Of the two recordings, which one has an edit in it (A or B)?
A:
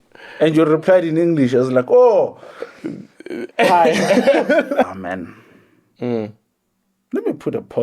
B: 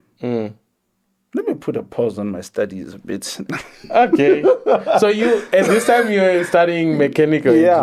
A